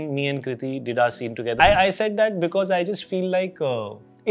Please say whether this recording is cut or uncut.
cut